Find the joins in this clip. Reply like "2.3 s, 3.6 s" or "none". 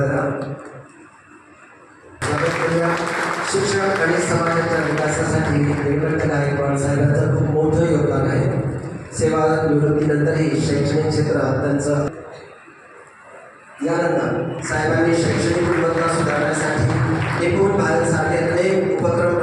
none